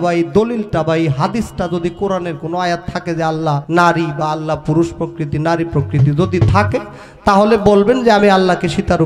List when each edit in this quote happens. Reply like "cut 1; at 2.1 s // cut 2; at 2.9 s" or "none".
cut 1; at 3.6 s